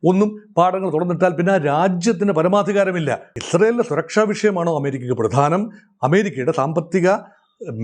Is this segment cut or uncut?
cut